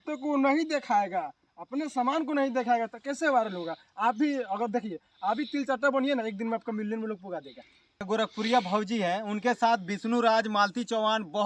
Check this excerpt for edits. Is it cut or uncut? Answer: cut